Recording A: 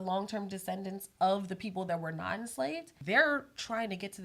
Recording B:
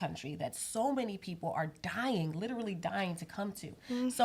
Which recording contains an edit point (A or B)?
A